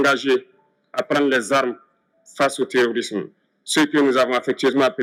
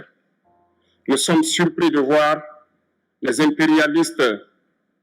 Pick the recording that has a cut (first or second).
second